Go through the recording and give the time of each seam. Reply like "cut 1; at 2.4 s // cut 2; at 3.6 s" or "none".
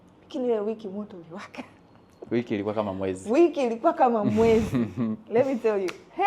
none

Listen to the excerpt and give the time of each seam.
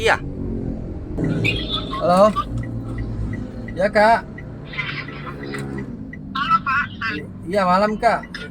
cut 1; at 1.2 s

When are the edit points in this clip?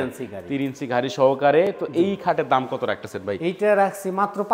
none

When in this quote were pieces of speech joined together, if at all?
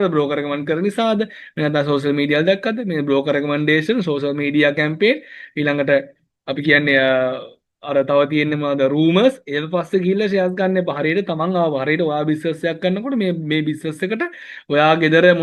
none

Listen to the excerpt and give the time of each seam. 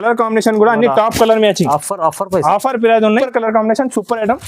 cut 1; at 3.2 s

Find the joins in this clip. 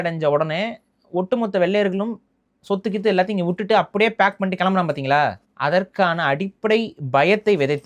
cut 1; at 5.5 s

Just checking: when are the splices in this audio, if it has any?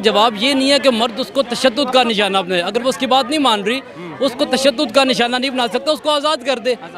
none

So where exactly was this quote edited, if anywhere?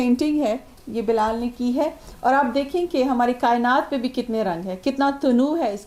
none

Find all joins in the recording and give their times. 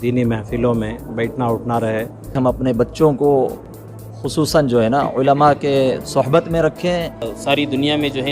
cut 1; at 2.3 s // cut 2; at 7.3 s

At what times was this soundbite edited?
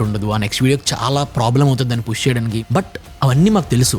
cut 1; at 2.6 s

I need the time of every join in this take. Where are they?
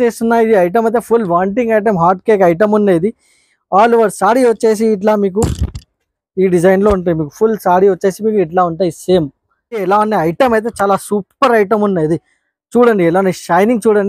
cut 1; at 9.8 s

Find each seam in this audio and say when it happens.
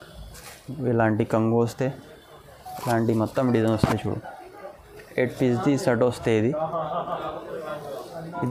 none

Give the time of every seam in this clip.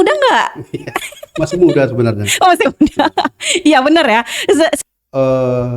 cut 1; at 4.8 s

